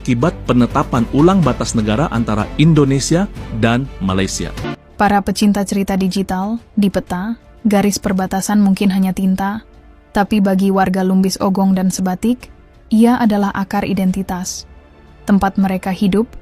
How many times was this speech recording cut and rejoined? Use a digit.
1